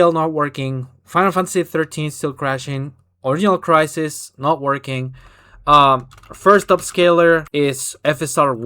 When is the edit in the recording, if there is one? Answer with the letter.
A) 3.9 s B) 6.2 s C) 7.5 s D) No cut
C